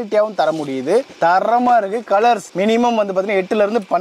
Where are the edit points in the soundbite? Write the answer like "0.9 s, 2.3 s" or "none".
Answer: none

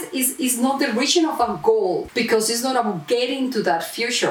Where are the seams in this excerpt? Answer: 2.1 s

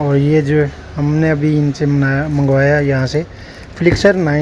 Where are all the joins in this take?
none

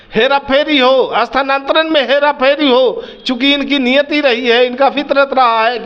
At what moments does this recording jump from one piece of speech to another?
none

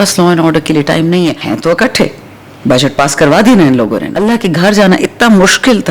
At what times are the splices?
1.5 s, 4.2 s

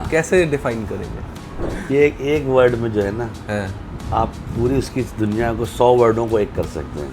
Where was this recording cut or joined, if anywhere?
1.5 s

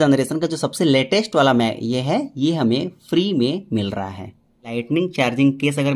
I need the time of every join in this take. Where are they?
4.7 s

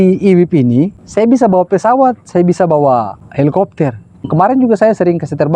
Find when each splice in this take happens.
1.0 s, 3.2 s, 4.2 s

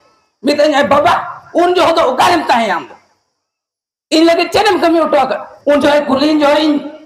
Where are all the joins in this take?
5.5 s

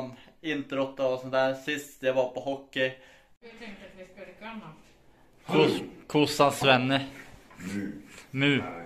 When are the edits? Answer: 3.4 s

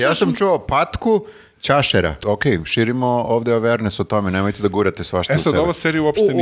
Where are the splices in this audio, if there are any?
2.2 s

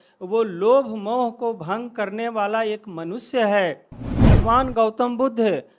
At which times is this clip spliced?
4.3 s

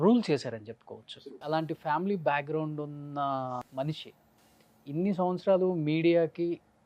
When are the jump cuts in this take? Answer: 1.4 s, 3.6 s

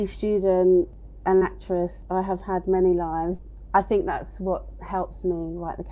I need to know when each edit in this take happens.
0.9 s, 2.0 s, 3.5 s

